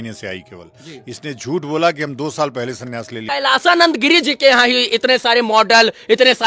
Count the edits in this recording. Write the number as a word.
one